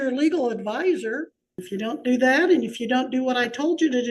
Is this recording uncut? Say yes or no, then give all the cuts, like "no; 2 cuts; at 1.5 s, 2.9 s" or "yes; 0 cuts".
no; 1 cut; at 1.6 s